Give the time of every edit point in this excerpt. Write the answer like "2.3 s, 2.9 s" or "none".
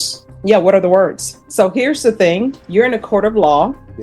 1.4 s, 2.6 s